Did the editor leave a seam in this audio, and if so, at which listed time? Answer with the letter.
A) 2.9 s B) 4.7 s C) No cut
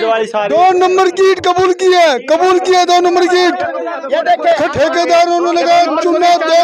B